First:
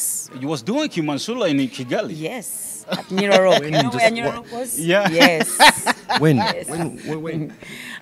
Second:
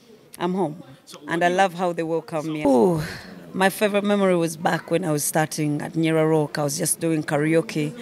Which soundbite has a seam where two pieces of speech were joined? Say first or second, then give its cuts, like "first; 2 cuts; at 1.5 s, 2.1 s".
second; 1 cut; at 2.6 s